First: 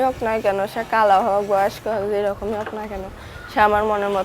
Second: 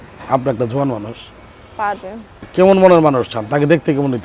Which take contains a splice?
second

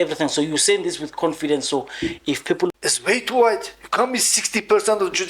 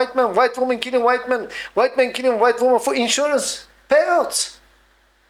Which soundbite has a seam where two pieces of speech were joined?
first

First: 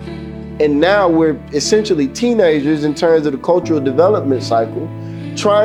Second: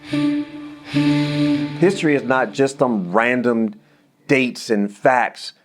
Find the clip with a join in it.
second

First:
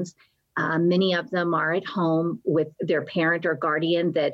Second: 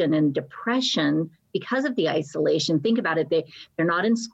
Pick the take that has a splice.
first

